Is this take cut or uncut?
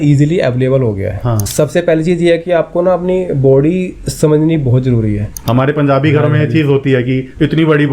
cut